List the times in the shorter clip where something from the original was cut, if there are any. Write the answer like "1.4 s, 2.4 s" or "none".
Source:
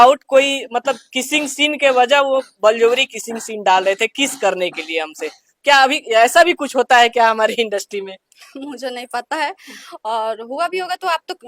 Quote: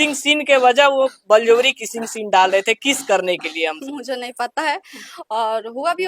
3.8 s